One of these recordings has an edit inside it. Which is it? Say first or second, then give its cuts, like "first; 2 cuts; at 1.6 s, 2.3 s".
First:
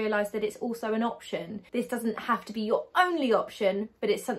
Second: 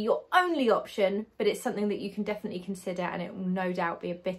first; 1 cut; at 1.6 s